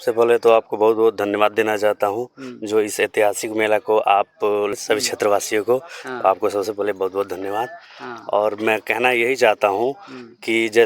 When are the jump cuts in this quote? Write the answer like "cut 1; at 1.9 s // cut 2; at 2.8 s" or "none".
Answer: cut 1; at 4.6 s